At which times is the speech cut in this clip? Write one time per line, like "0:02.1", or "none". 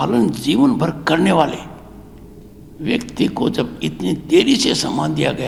none